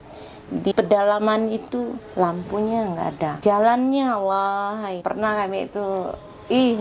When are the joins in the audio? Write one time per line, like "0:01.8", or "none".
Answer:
0:00.7
0:03.4
0:05.0